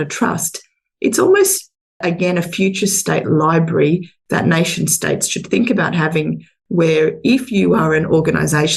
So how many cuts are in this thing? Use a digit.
0